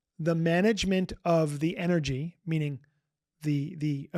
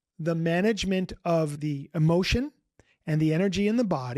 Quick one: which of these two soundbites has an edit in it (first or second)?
second